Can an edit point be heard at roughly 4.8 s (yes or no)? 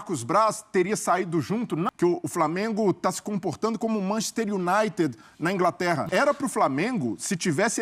no